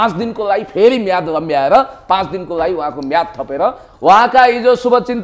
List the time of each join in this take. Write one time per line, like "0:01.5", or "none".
0:03.8

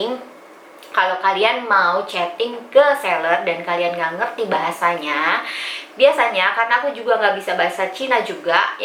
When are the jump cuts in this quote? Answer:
none

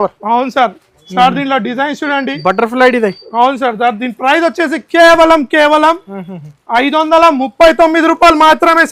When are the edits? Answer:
none

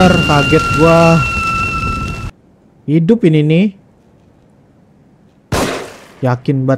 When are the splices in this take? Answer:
0:02.3

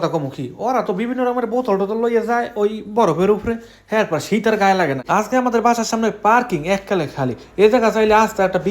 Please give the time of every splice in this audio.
0:05.0

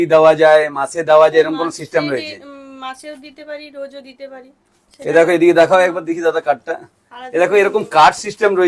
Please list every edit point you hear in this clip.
none

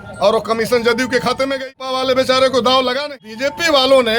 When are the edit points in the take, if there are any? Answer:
0:01.8
0:03.1

